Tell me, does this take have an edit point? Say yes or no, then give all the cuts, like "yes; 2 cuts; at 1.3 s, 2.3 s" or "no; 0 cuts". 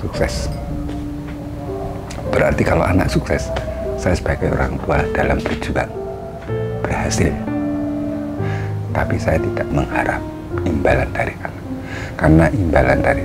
yes; 1 cut; at 9.7 s